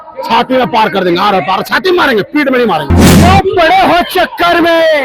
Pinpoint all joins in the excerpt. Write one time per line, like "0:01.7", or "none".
0:03.1